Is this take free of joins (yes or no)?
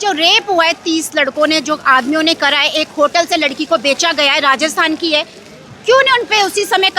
yes